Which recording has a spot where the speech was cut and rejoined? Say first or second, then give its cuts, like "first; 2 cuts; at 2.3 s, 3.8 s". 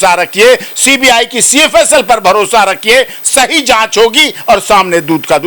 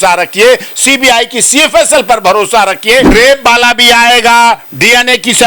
second; 1 cut; at 3.1 s